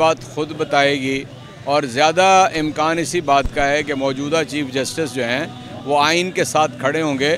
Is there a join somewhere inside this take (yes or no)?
no